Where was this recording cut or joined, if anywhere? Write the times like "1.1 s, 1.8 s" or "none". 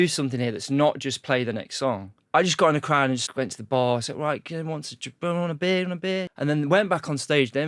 2.2 s, 3.2 s, 6.3 s